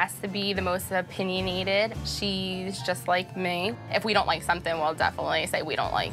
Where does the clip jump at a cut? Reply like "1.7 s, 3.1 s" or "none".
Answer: none